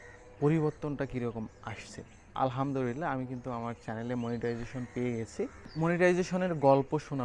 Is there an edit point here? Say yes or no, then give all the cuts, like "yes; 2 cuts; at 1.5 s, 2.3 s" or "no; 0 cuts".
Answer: yes; 2 cuts; at 2.3 s, 5.7 s